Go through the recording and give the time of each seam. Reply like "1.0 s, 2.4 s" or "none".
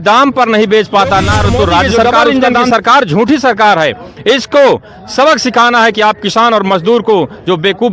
2.5 s